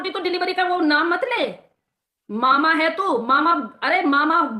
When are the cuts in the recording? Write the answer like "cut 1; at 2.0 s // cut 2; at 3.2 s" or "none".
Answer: none